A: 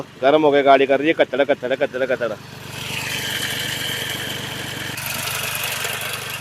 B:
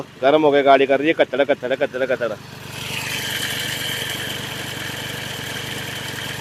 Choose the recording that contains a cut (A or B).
A